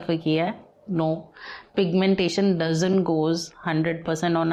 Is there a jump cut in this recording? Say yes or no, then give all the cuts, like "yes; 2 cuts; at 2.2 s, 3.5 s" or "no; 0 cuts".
no; 0 cuts